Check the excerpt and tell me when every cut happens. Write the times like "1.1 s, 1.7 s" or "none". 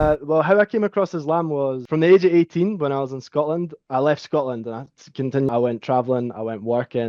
none